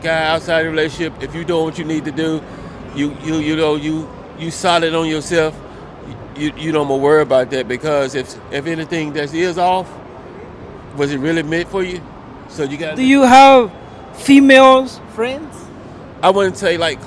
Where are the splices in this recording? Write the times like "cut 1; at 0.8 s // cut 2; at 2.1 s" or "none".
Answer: none